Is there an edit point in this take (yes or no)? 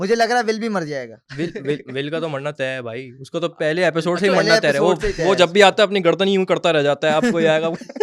no